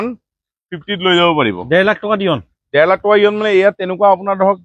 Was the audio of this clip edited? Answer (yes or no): no